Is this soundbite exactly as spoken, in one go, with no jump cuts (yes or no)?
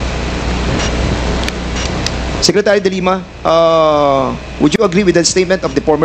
yes